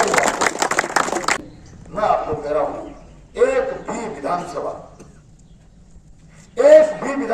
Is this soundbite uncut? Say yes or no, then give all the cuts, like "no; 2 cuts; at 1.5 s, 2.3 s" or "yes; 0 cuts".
no; 1 cut; at 1.4 s